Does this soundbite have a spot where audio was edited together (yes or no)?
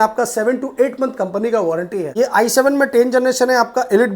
yes